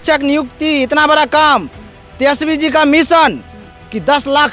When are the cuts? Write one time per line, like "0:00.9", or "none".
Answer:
none